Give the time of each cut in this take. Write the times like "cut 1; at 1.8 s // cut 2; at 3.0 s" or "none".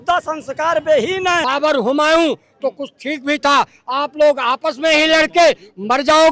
cut 1; at 1.4 s